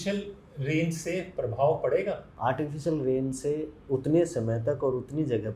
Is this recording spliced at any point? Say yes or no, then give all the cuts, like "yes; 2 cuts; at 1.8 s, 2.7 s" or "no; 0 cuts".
yes; 1 cut; at 2.3 s